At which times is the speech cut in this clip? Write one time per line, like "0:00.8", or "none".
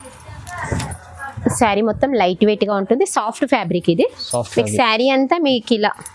none